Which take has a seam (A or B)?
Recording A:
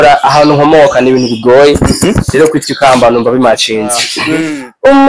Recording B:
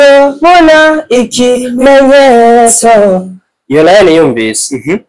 A